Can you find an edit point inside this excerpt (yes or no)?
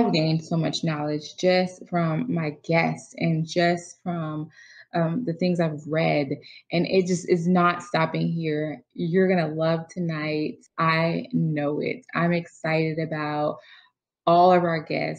no